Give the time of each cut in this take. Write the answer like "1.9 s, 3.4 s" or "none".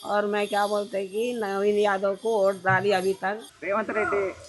3.5 s

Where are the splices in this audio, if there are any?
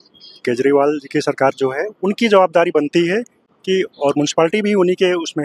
none

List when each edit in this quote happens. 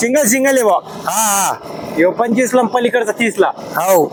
none

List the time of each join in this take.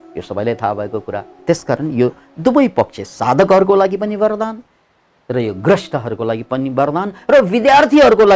1.3 s

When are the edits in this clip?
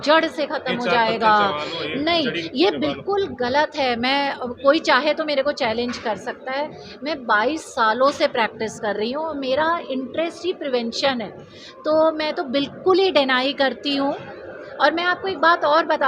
none

